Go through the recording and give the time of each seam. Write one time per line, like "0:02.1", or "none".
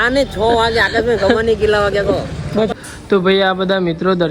0:02.7